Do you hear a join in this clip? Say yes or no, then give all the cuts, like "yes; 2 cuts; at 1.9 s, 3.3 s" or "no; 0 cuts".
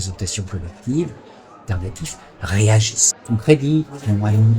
yes; 2 cuts; at 1.7 s, 3.2 s